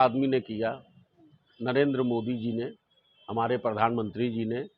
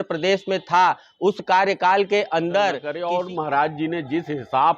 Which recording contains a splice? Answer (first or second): second